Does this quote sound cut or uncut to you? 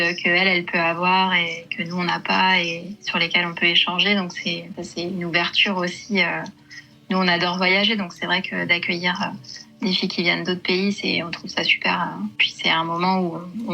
cut